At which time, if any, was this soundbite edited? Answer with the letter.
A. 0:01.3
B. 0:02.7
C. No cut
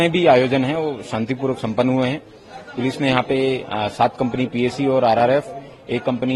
C